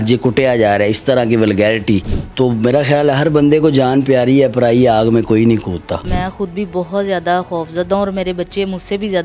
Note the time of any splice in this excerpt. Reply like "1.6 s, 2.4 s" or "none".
2.2 s, 6.1 s